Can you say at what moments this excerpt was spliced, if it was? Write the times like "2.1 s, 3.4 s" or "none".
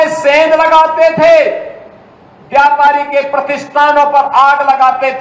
none